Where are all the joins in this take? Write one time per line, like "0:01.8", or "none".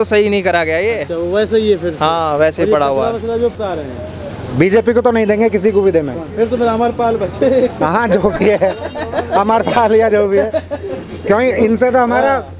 0:03.5